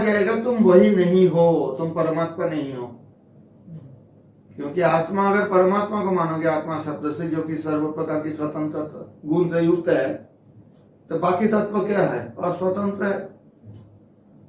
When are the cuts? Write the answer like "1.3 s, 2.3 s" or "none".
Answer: none